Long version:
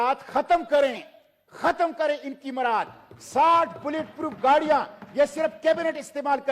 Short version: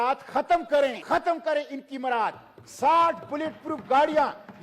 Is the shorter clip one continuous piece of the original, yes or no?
no